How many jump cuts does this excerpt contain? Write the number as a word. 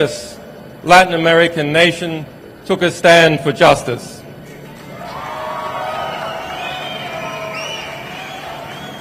zero